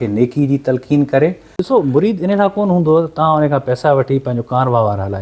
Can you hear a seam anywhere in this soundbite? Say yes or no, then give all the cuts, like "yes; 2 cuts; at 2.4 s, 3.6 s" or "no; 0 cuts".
yes; 1 cut; at 1.6 s